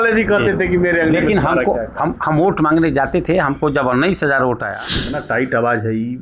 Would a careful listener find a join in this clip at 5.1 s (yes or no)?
yes